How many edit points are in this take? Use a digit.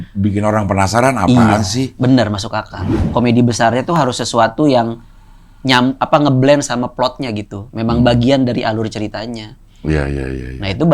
1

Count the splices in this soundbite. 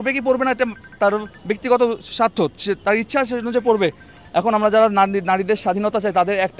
0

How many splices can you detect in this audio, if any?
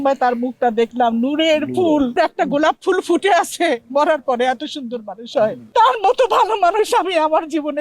2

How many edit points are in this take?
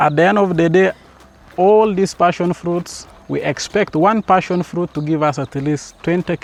0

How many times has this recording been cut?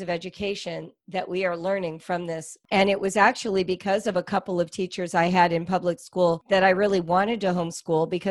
1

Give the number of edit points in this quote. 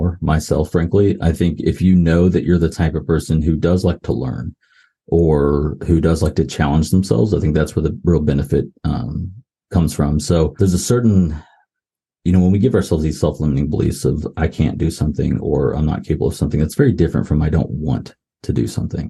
1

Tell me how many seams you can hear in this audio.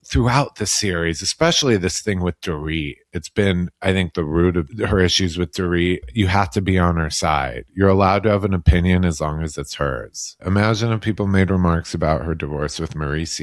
3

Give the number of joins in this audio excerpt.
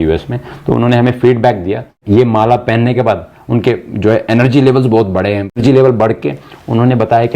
2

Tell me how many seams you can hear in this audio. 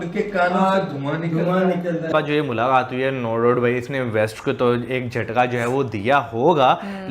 1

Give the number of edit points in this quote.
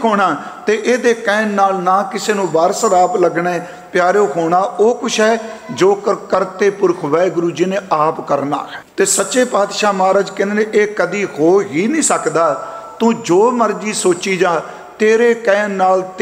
1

